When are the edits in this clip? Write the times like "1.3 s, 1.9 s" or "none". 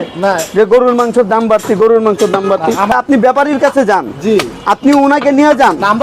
2.9 s